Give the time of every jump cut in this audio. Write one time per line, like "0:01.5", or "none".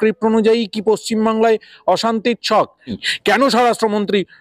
0:03.0